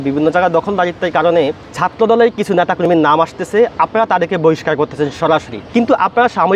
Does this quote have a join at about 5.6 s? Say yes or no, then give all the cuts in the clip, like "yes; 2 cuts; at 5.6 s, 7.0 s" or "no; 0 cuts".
yes; 1 cut; at 5.6 s